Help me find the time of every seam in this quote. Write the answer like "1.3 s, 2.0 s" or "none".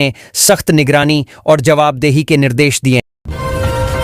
2.9 s